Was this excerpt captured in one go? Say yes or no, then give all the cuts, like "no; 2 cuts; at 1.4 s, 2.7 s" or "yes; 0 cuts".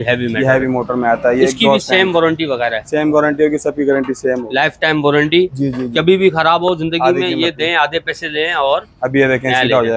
yes; 0 cuts